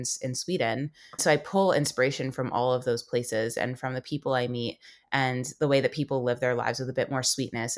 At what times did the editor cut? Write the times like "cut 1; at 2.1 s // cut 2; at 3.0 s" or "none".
cut 1; at 1.2 s

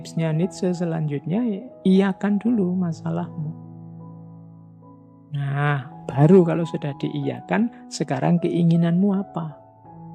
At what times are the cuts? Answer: cut 1; at 3.5 s // cut 2; at 5.0 s

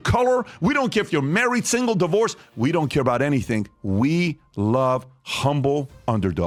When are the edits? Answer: none

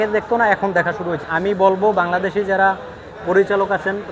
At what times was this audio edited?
cut 1; at 1.2 s

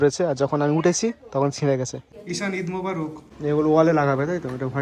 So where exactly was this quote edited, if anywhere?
cut 1; at 2.0 s // cut 2; at 3.2 s

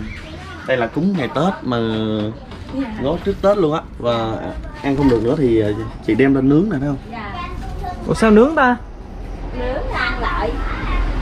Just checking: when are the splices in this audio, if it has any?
none

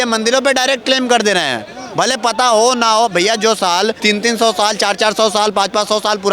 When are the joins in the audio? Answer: cut 1; at 4.0 s

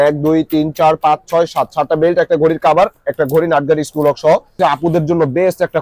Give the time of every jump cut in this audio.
cut 1; at 4.5 s

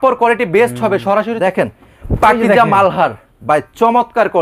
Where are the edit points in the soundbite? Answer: cut 1; at 1.3 s

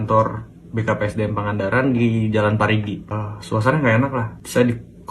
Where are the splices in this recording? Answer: cut 1; at 3.1 s

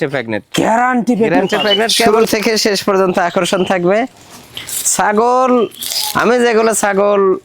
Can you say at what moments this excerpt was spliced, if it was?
cut 1; at 2.1 s

